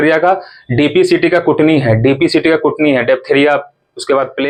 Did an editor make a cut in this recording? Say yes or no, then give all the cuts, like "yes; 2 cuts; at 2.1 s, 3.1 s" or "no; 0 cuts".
no; 0 cuts